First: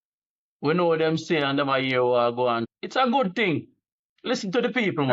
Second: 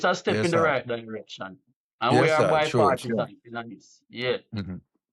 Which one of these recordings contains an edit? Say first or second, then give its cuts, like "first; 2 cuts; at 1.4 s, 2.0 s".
first; 1 cut; at 2.7 s